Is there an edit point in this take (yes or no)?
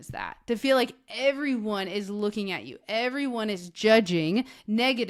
no